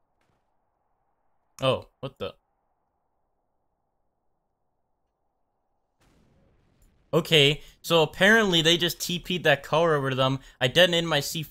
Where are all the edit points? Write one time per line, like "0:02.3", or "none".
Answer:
none